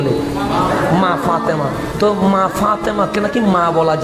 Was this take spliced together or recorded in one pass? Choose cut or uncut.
uncut